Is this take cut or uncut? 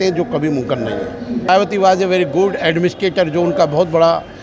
cut